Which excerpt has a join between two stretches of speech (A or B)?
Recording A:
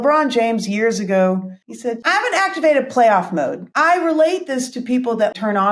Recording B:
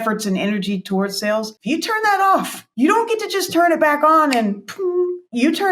A